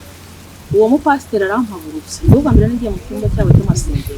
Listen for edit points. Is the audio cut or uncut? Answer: uncut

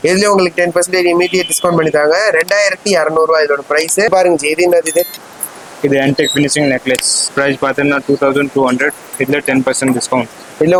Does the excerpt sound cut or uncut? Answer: uncut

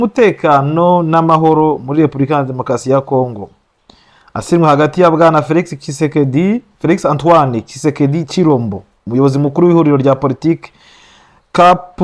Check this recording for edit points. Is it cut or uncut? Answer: uncut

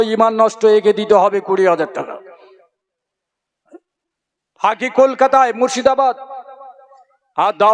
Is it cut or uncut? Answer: uncut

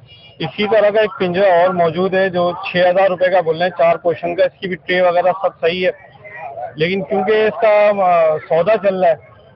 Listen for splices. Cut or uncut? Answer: uncut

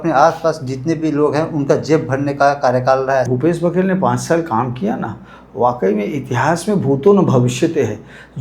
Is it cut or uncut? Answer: cut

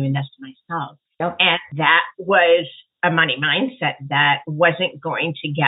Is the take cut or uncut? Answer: cut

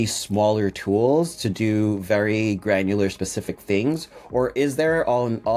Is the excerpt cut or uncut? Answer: uncut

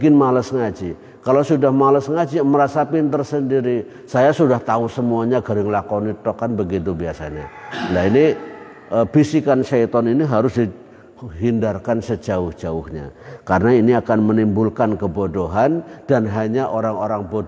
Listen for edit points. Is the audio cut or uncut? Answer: uncut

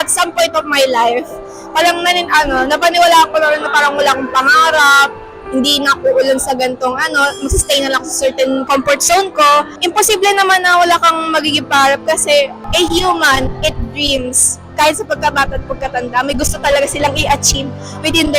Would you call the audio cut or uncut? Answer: cut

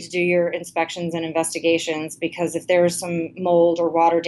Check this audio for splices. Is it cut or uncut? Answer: uncut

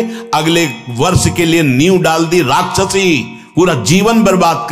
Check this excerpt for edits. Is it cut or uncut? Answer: uncut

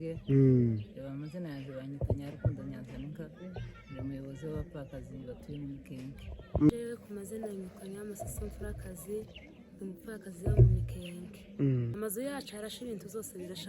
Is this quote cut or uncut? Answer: cut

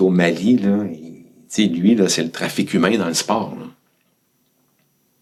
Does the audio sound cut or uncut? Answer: uncut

